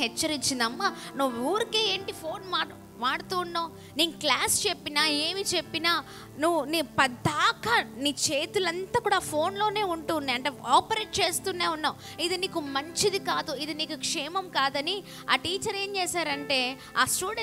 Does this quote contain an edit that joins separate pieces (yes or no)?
no